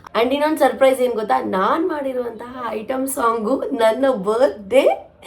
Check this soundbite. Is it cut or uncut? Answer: uncut